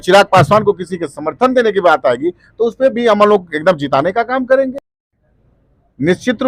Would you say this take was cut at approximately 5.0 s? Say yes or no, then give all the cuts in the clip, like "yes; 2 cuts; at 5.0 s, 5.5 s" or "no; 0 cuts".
no; 0 cuts